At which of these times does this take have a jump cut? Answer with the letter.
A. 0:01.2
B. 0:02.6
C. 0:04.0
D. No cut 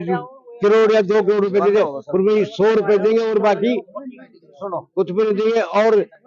D